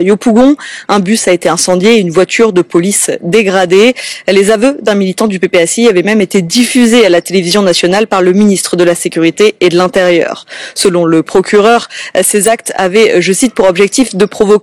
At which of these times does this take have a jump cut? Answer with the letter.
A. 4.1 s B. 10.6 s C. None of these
A